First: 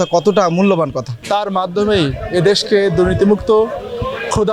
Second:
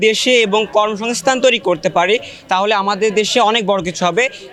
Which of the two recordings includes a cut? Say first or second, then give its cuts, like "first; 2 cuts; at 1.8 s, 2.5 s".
first; 1 cut; at 1.1 s